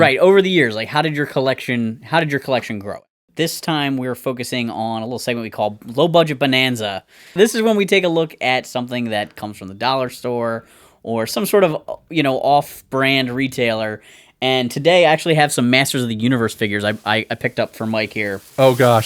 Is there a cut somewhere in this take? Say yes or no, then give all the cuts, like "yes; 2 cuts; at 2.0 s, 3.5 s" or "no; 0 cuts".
yes; 2 cuts; at 3.1 s, 7.3 s